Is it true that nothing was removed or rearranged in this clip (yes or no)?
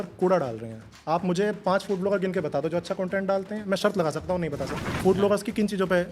no